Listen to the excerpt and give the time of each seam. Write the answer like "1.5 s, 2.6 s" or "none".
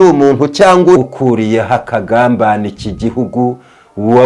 1.0 s